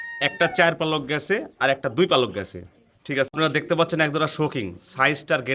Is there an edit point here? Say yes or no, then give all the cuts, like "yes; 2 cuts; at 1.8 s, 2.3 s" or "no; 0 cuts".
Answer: yes; 1 cut; at 3.3 s